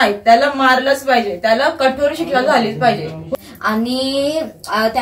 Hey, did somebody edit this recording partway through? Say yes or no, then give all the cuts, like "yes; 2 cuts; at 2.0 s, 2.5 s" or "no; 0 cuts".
yes; 1 cut; at 3.4 s